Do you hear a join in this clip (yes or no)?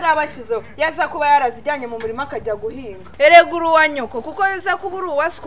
yes